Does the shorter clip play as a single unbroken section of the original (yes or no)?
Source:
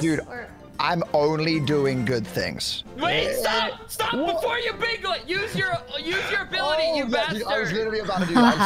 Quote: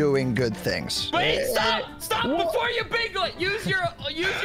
no